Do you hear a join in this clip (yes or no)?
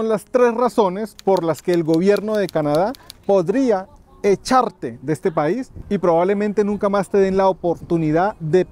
no